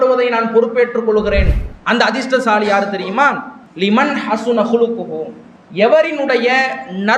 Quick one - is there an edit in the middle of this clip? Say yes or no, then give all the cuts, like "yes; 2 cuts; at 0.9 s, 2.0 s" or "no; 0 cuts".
no; 0 cuts